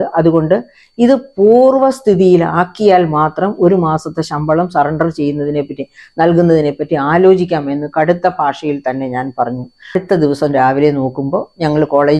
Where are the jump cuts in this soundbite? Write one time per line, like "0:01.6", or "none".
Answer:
0:09.9